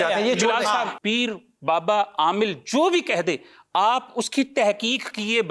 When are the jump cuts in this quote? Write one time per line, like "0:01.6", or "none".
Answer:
0:00.9